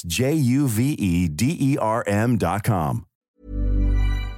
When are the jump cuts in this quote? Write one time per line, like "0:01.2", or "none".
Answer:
0:03.1